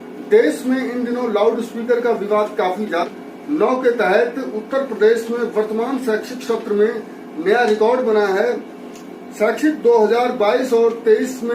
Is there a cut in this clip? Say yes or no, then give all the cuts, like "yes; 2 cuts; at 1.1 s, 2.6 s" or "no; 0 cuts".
yes; 1 cut; at 3.0 s